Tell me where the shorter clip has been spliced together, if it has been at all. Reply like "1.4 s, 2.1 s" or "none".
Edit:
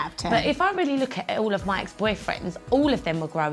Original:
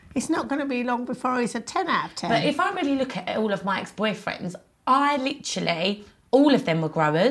2.5 s